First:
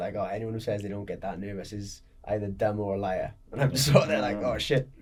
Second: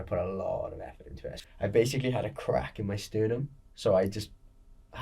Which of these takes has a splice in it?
second; 2 cuts; at 1.3 s, 3.7 s

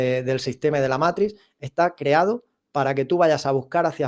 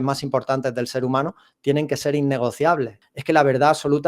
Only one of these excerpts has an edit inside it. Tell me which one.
second; 1 cut; at 3.0 s

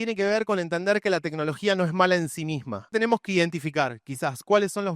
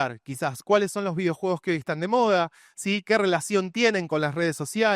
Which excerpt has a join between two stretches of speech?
first; 1 cut; at 2.9 s

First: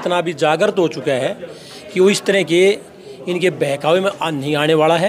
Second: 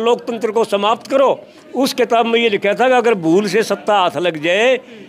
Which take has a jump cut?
second; 1 cut; at 1.6 s

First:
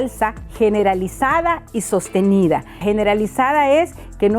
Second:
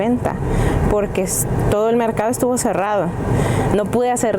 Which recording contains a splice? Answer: first; 1 cut; at 2.7 s

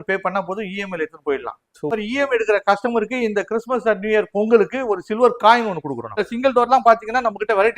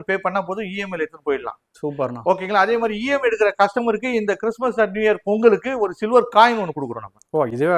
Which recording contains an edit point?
first; 2 cuts; at 1.9 s, 6.3 s

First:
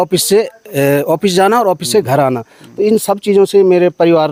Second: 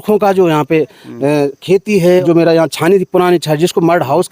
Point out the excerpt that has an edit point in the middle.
second; 1 cut; at 2.2 s

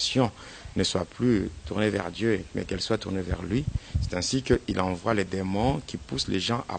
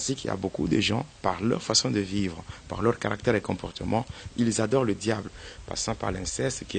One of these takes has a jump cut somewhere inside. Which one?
second; 1 cut; at 5.4 s

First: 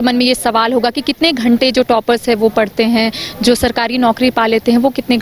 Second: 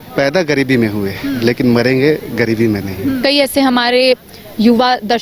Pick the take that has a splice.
second; 1 cut; at 3.2 s

